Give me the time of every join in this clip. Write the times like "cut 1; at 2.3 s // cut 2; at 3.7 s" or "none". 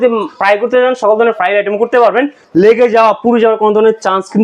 cut 1; at 2.4 s

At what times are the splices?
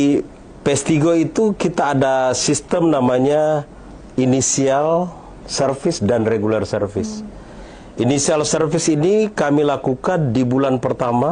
none

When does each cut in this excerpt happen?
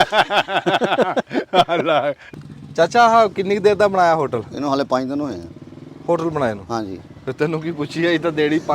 cut 1; at 2.2 s

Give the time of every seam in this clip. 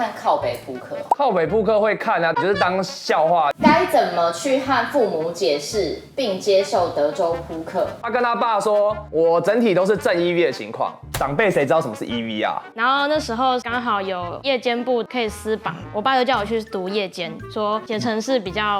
cut 1; at 3.6 s // cut 2; at 8.0 s // cut 3; at 12.6 s // cut 4; at 17.4 s

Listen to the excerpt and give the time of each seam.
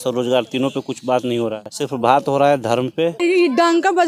cut 1; at 1.6 s // cut 2; at 3.2 s

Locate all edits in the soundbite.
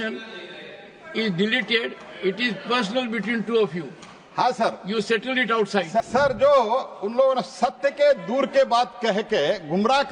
cut 1; at 6.1 s

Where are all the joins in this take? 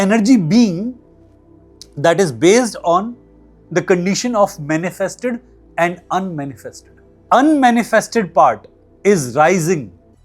cut 1; at 7.2 s

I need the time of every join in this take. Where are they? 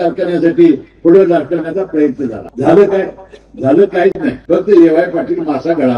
cut 1; at 2.4 s // cut 2; at 4.3 s

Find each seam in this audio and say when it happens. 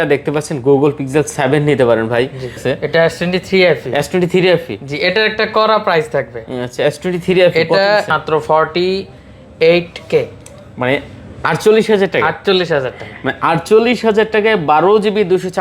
cut 1; at 2.6 s // cut 2; at 8.1 s

